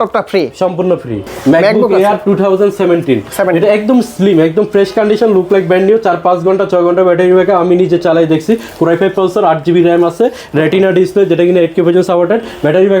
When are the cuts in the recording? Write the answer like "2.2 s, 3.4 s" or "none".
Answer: none